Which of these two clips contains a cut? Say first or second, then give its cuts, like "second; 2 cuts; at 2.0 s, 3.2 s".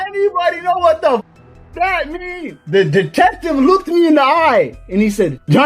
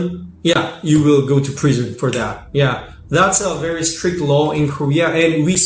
first; 1 cut; at 2.5 s